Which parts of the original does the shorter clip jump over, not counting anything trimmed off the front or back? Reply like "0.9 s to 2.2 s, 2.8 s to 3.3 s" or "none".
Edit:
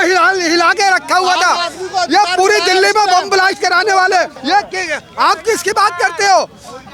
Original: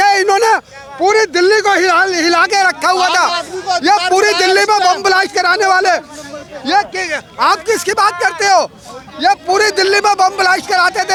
6.1 s to 6.6 s